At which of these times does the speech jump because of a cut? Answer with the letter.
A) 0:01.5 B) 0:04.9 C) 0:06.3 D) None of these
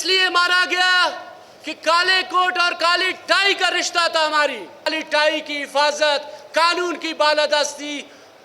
B